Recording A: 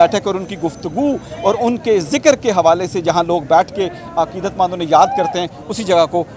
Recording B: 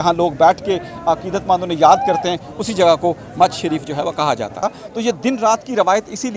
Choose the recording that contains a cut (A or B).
B